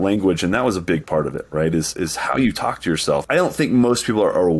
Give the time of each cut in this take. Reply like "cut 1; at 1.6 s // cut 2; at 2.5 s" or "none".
cut 1; at 3.2 s